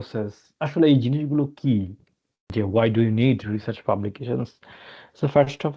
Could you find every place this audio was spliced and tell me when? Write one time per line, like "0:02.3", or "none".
0:02.5